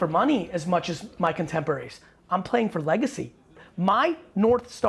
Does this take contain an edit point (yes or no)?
yes